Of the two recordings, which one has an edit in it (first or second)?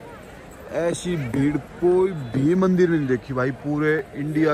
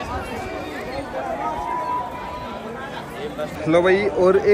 second